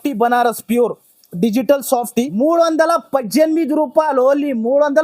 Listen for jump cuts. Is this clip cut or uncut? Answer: cut